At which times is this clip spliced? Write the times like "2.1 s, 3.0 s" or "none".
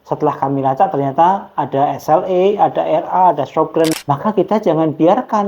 4.0 s